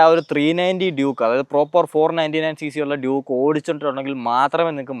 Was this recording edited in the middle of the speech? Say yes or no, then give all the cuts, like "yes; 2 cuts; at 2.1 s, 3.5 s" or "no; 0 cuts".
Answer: no; 0 cuts